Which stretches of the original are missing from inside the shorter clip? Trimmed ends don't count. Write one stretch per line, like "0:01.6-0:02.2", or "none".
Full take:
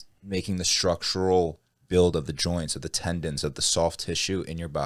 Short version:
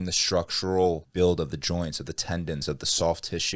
0:01.6-0:01.8